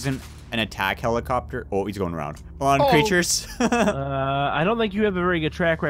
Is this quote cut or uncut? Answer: uncut